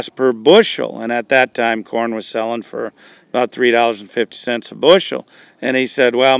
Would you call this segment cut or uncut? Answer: uncut